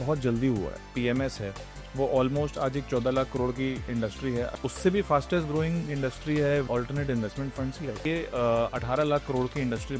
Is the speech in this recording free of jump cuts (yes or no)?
no